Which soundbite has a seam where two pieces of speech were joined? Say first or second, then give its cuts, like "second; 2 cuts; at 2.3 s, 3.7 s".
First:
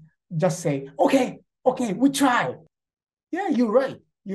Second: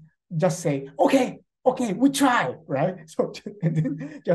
first; 1 cut; at 2.6 s